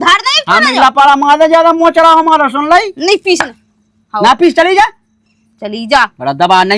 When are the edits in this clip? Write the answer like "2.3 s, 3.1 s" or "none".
none